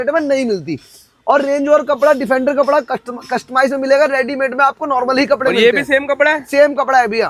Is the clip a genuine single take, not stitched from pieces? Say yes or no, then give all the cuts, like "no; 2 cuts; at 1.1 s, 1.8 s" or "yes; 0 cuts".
yes; 0 cuts